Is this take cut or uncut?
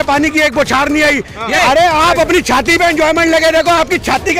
cut